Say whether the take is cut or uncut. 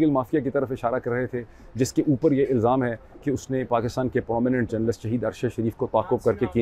uncut